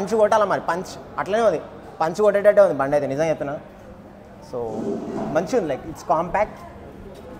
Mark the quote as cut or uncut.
uncut